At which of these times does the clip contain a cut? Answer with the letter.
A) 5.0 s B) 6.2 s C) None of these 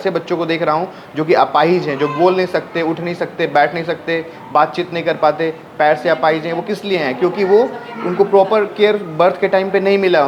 C